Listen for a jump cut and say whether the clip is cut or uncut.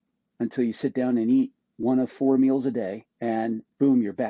cut